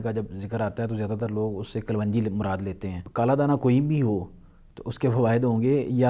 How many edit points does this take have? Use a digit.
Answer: 1